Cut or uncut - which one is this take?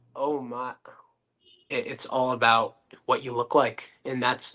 cut